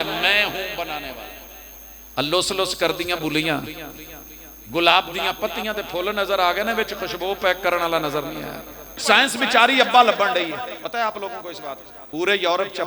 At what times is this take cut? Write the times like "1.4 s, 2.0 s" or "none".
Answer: 9.0 s, 10.9 s, 11.9 s